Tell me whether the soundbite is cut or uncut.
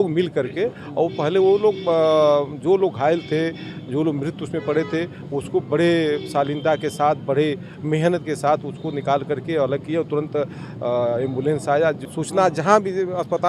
cut